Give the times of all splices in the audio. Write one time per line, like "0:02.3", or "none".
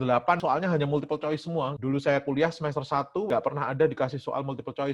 none